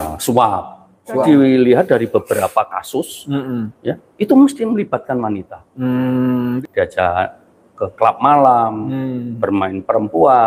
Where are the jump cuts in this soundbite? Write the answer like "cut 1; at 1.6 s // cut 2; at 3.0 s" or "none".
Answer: cut 1; at 1.2 s // cut 2; at 6.5 s